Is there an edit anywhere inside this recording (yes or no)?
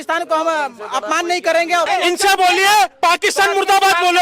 yes